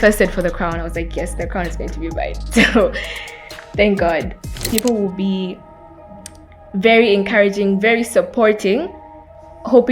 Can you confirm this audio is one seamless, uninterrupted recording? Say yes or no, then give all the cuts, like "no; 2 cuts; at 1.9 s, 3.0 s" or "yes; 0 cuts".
no; 1 cut; at 4.6 s